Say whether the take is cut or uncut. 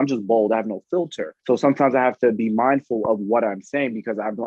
cut